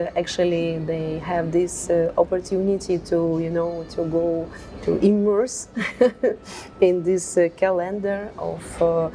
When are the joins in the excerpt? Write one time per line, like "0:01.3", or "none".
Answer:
none